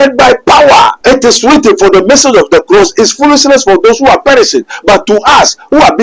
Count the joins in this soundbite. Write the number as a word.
one